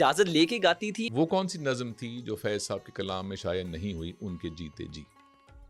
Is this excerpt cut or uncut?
cut